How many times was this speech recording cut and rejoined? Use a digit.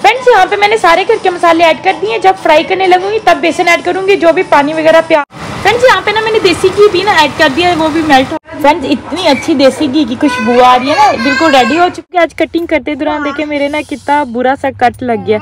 3